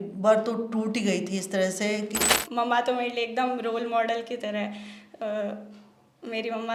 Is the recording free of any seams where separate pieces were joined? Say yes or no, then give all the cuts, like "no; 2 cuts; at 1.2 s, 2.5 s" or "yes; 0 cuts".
no; 1 cut; at 2.4 s